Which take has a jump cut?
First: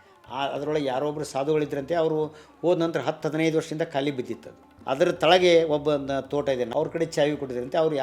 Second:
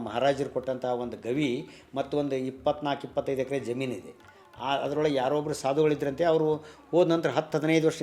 first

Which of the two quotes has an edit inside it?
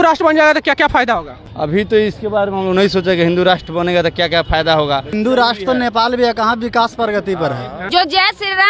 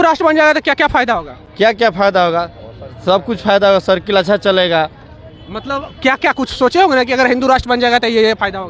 first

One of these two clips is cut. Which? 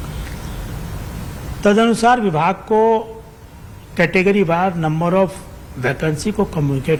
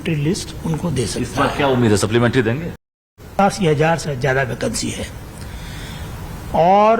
second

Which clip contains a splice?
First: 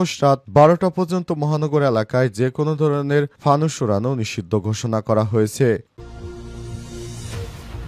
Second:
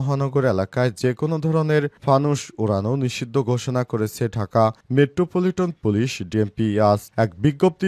first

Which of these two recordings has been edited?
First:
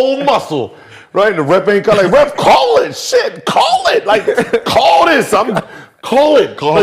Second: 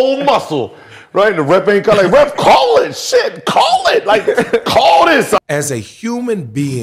second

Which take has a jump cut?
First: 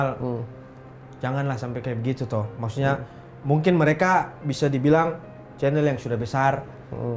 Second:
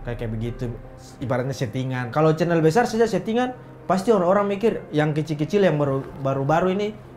second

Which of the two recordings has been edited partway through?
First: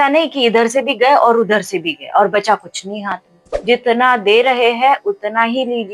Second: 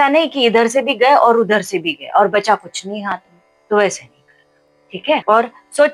first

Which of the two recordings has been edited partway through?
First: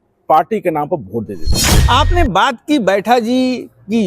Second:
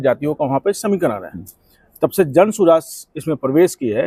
first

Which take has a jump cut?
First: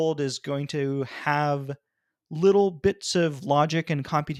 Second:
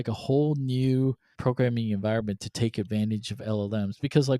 second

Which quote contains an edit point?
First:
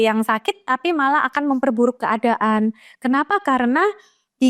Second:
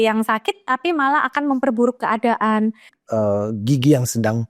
second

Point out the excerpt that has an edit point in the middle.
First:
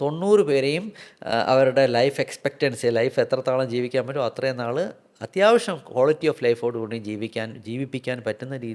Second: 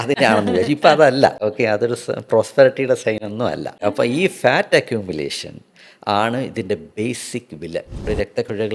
second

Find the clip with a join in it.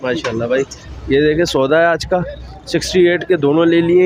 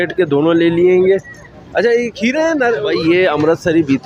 second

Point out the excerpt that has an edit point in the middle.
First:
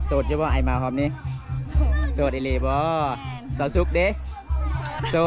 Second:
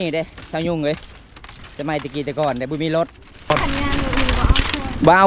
second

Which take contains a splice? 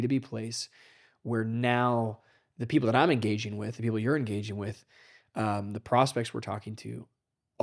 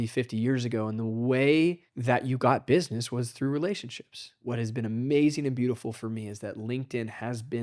second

